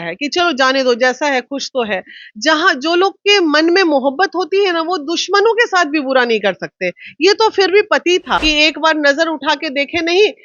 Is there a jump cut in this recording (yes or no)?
yes